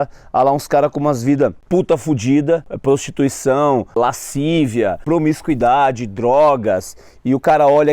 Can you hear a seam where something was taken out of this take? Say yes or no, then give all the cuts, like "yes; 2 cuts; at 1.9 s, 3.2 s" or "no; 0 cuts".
yes; 4 cuts; at 1.6 s, 2.7 s, 4.0 s, 5.0 s